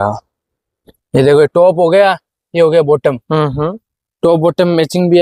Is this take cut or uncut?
uncut